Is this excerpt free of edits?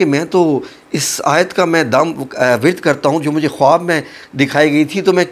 yes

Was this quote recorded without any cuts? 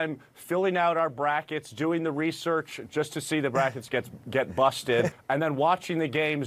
no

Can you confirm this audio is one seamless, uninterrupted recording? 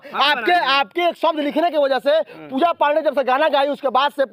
yes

